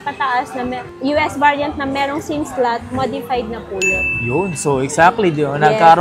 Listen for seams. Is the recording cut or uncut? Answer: uncut